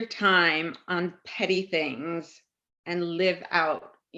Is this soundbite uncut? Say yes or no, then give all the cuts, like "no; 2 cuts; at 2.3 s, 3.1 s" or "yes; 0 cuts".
yes; 0 cuts